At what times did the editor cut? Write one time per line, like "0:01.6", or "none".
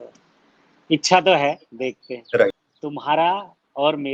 0:02.7